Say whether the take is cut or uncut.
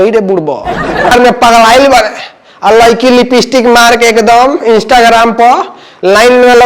cut